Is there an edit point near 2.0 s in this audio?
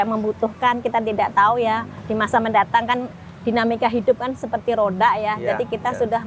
yes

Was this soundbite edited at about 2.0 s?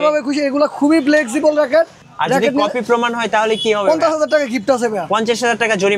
yes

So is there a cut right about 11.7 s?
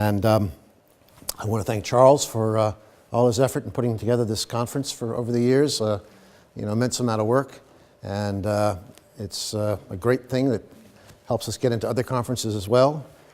yes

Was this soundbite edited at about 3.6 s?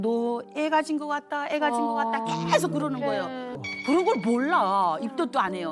yes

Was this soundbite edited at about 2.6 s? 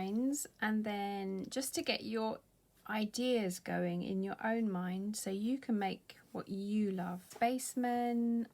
no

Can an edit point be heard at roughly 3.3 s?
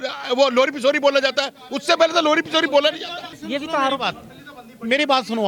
yes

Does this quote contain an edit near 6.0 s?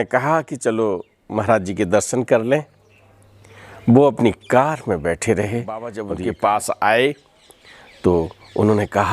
yes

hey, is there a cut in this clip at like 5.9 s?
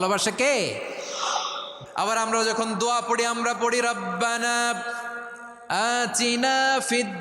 no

